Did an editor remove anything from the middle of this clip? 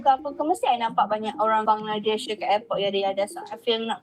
yes; 1 cut; at 2.0 s

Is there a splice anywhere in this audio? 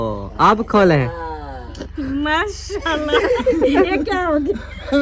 no; 0 cuts

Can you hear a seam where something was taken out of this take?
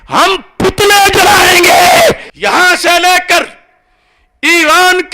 yes; 1 cut; at 2.3 s

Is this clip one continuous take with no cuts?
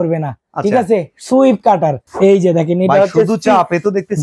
no; 1 cut; at 2.0 s

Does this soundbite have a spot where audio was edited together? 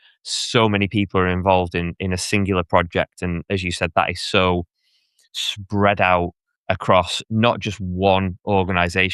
no; 0 cuts

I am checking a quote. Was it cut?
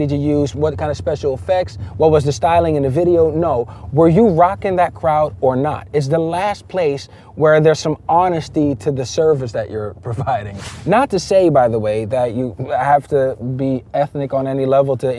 yes; 1 cut; at 10.6 s

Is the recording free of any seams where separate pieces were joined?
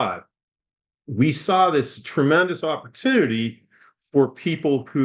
yes; 0 cuts

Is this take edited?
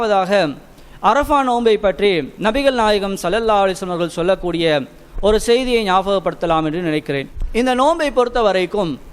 yes; 1 cut; at 7.4 s

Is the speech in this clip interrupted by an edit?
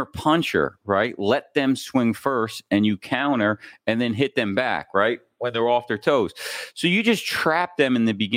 no; 0 cuts

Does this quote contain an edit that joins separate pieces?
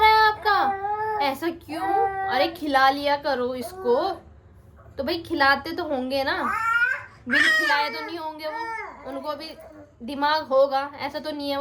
no; 0 cuts

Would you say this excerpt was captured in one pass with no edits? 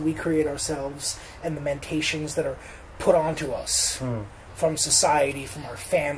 yes; 0 cuts

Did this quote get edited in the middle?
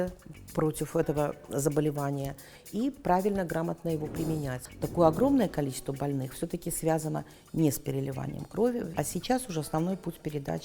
yes; 2 cuts; at 4.6 s, 8.9 s

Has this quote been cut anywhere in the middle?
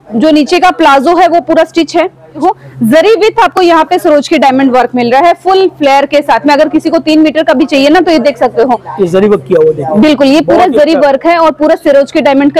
yes; 1 cut; at 2.4 s

